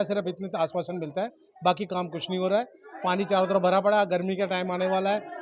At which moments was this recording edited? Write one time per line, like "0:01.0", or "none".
none